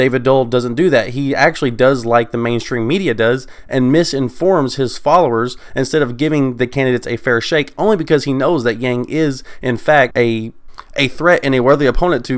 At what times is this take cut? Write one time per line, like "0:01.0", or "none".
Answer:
0:10.1

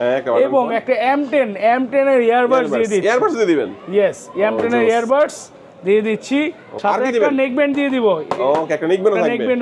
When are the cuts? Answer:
0:06.9

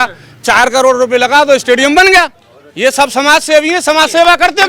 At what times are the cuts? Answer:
none

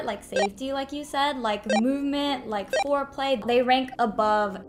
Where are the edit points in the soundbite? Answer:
0:03.4

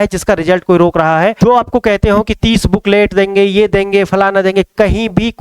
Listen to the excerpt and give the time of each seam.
0:01.4

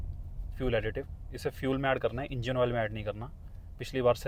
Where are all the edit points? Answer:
none

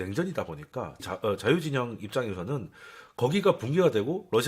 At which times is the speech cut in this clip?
0:01.1

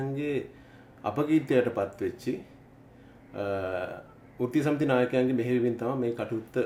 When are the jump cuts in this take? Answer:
none

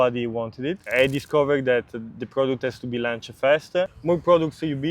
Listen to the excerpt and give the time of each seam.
0:00.9
0:04.0

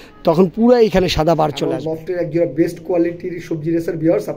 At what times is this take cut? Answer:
0:01.7

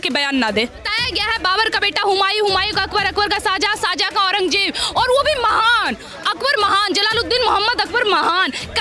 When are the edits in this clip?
0:00.9

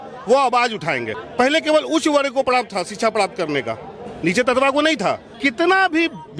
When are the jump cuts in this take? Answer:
0:01.2
0:05.3

